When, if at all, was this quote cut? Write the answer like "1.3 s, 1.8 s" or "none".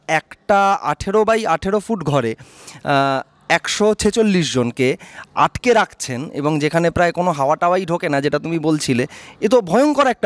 none